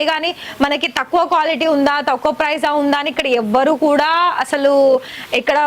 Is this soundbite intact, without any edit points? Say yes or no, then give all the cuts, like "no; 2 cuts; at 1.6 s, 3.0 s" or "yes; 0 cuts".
yes; 0 cuts